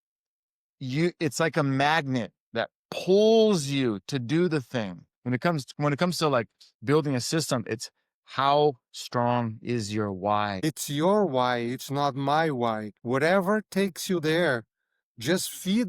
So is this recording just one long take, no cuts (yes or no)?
no